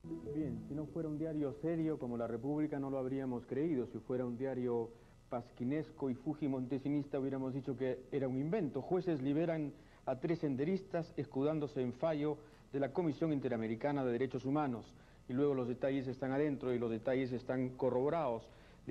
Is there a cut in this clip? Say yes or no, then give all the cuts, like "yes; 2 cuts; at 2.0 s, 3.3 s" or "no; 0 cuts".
no; 0 cuts